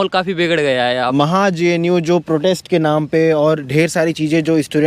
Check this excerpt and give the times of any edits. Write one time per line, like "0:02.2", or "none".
0:01.1